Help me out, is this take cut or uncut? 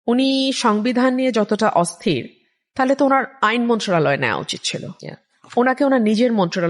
uncut